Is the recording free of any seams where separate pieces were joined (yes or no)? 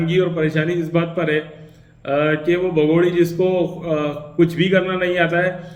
yes